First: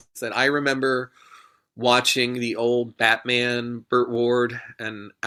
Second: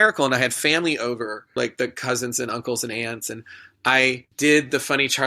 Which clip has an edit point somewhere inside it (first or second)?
second